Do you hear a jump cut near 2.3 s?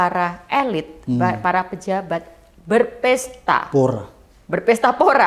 no; 0 cuts

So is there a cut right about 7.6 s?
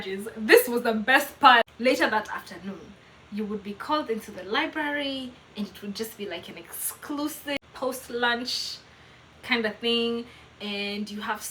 yes; 2 cuts; at 1.7 s, 7.6 s

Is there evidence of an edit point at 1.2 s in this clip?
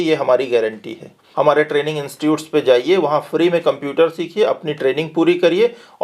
yes; 1 cut; at 1.2 s

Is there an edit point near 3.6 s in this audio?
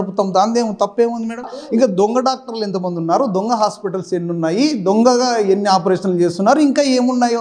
no; 1 cut; at 1.6 s

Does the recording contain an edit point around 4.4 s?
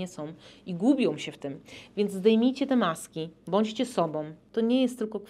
yes; 1 cut; at 4.4 s

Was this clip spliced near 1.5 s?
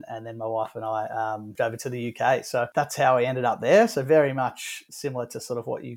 yes; 3 cuts; at 1.5 s, 2.7 s, 4.9 s

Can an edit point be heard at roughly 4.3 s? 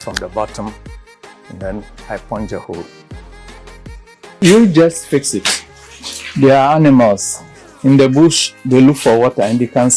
yes; 1 cut; at 4.3 s

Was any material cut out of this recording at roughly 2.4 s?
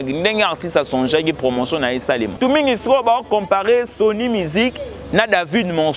yes; 1 cut; at 2.4 s

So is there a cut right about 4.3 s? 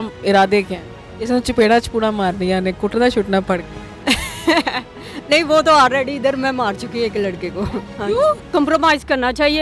no; 1 cut; at 8.5 s

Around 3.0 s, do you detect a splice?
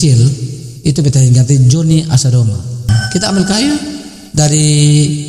yes; 1 cut; at 3.0 s

